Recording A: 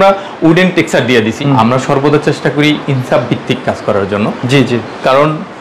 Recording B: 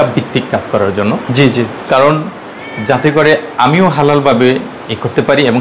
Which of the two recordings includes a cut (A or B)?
A